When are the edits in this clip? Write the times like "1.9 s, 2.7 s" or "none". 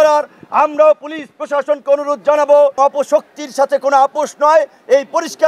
2.8 s